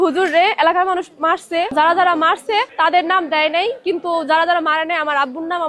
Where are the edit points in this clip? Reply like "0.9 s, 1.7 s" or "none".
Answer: 1.7 s, 2.7 s